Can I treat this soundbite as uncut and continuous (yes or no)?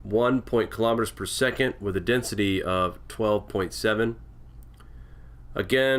no